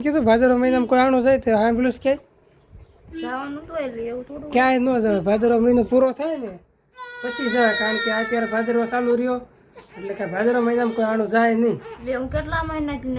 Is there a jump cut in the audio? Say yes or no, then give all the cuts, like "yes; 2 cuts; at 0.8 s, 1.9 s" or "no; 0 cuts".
yes; 1 cut; at 11.9 s